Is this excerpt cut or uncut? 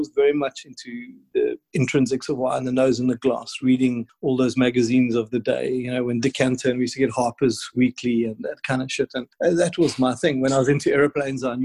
cut